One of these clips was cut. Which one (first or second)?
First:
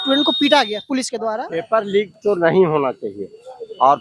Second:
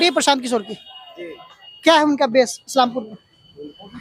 first